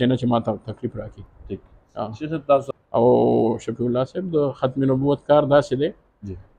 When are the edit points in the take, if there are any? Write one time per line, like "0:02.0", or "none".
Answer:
0:02.7